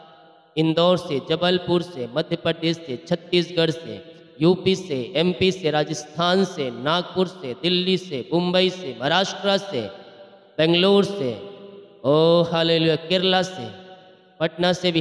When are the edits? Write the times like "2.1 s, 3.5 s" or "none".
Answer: none